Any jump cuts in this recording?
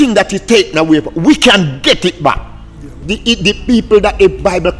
yes; 1 cut; at 3.1 s

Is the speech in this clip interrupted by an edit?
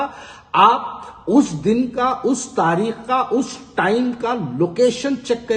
no; 0 cuts

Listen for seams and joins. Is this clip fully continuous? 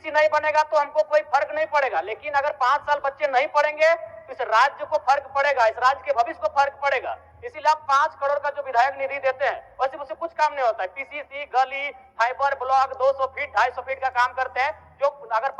yes; 0 cuts

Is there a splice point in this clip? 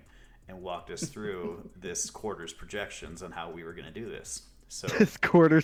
no; 0 cuts

